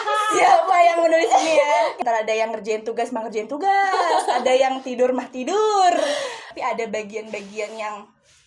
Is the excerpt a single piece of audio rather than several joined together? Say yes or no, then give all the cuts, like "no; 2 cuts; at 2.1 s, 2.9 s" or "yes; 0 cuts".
no; 2 cuts; at 1.9 s, 6.4 s